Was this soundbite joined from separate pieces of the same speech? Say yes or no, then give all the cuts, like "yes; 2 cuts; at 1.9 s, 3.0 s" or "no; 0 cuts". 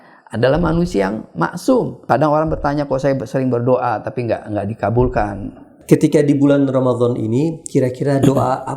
yes; 2 cuts; at 2.0 s, 5.7 s